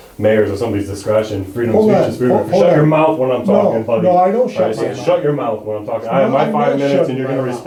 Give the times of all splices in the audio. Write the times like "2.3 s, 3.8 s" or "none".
none